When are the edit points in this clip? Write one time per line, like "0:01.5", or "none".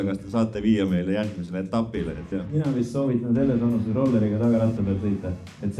0:02.3